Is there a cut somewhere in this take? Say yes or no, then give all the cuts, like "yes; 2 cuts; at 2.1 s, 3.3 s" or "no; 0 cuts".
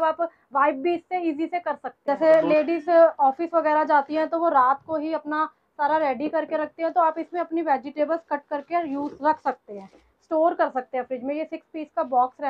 yes; 1 cut; at 1.9 s